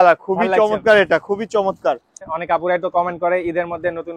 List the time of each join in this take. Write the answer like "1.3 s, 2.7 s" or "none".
2.2 s